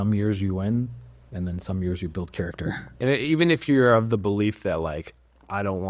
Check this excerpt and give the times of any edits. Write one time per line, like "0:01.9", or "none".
0:02.9